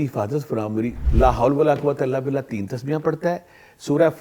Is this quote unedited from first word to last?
no; 1 cut; at 1.0 s

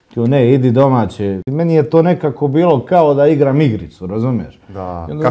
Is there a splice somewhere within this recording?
yes; 1 cut; at 1.4 s

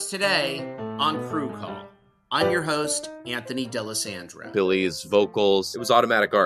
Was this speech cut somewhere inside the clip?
no; 0 cuts

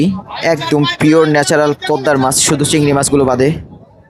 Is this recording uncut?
yes; 0 cuts

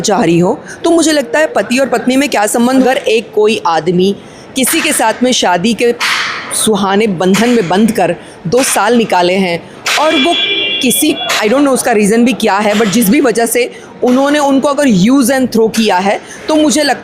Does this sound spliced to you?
yes; 1 cut; at 2.8 s

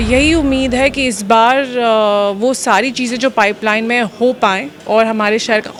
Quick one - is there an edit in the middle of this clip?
no; 0 cuts

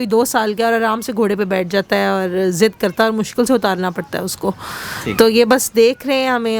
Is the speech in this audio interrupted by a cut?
no; 0 cuts

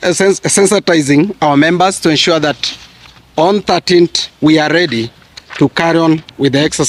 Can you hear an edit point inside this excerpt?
no; 0 cuts

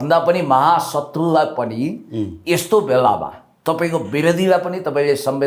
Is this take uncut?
yes; 0 cuts

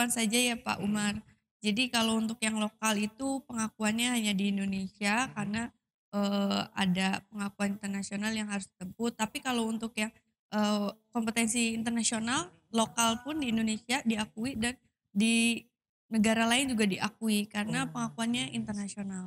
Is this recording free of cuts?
yes; 0 cuts

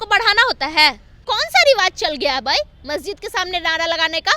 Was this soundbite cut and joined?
yes; 1 cut; at 1.1 s

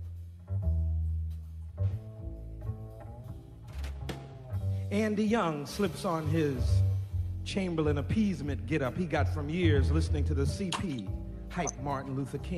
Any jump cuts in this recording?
yes; 1 cut; at 8.8 s

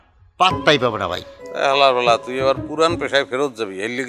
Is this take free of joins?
no; 1 cut; at 1.3 s

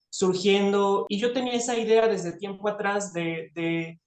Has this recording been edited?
yes; 1 cut; at 1.1 s

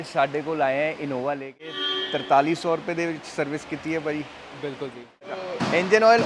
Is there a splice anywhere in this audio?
yes; 1 cut; at 1.8 s

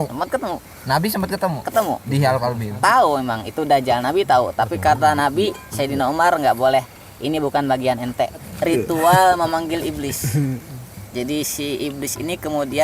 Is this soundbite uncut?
no; 1 cut; at 8.5 s

